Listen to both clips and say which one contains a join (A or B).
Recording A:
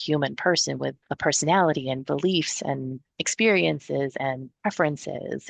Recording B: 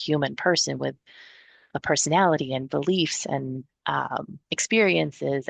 A